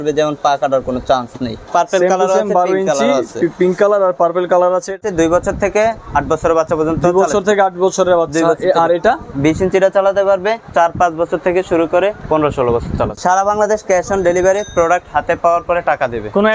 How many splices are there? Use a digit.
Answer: 6